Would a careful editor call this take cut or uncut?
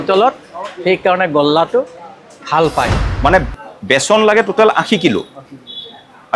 cut